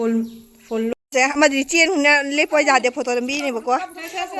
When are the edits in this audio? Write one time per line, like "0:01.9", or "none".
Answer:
0:00.9

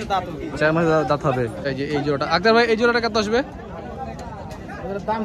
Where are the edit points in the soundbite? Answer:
0:01.6

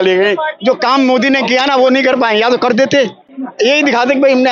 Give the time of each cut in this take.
none

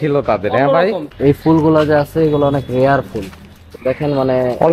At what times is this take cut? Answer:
0:01.1

